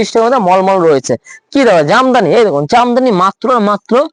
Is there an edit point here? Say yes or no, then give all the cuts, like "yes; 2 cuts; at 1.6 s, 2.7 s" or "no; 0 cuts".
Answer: no; 0 cuts